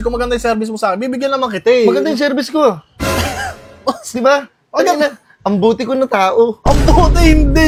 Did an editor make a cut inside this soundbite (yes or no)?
no